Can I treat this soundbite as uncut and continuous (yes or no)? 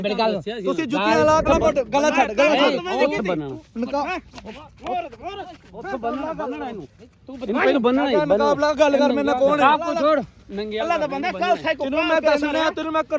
no